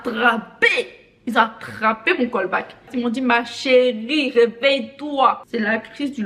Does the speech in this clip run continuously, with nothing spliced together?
yes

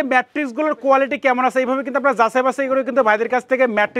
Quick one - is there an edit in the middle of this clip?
no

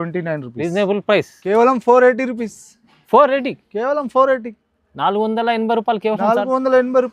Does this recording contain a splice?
yes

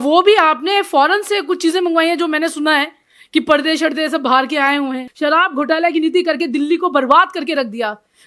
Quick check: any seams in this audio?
yes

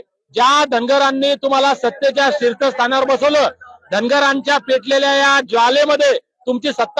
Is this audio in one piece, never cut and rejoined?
yes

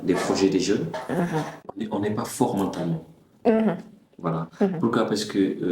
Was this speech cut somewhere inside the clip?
yes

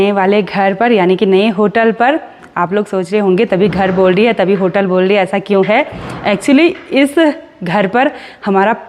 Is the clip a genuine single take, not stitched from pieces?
yes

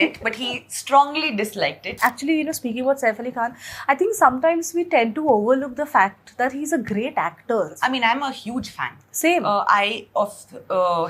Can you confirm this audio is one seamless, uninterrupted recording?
no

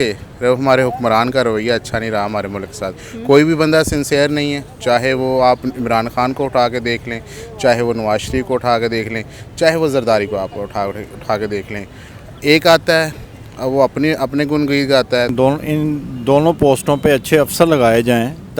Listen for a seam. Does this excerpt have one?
yes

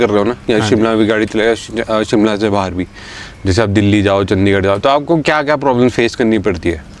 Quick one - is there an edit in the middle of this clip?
no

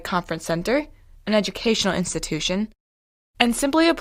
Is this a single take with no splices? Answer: yes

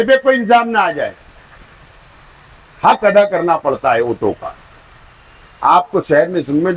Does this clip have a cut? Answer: no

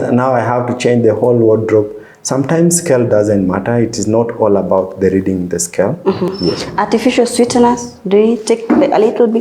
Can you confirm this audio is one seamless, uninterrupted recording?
no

